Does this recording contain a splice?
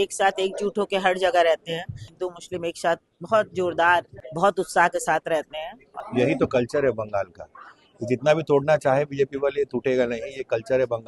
yes; 3 cuts; at 2.1 s, 4.2 s, 5.8 s

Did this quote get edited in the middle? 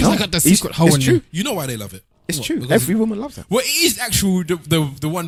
no; 0 cuts

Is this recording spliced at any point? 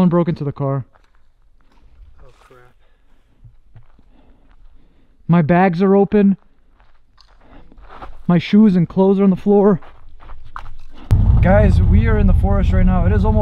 yes; 1 cut; at 11.1 s

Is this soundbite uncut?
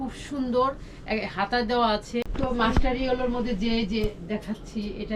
no; 1 cut; at 2.3 s

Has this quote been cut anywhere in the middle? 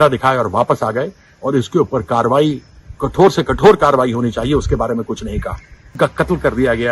yes; 1 cut; at 6.0 s

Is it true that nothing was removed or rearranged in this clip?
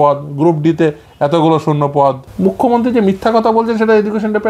no; 1 cut; at 2.3 s

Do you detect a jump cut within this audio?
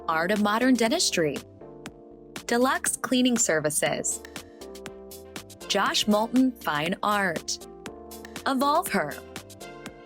yes; 3 cuts; at 4.1 s, 5.7 s, 9.1 s

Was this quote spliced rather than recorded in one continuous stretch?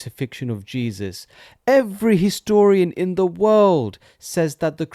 no; 0 cuts

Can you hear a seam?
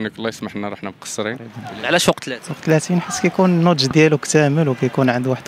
yes; 1 cut; at 1.6 s

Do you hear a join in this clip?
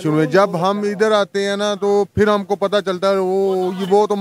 no; 0 cuts

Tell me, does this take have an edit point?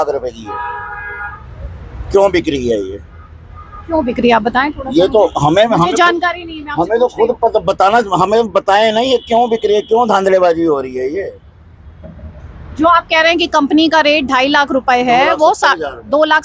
no; 0 cuts

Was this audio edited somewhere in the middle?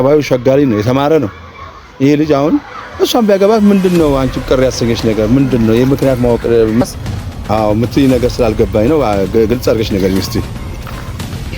yes; 1 cut; at 6.8 s

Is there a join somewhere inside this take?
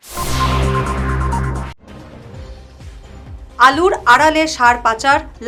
no; 0 cuts

